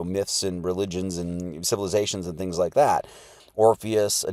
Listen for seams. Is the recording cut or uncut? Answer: cut